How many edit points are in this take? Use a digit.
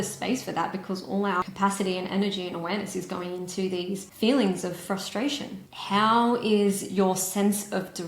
2